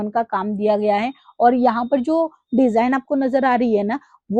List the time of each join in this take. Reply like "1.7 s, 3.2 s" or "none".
none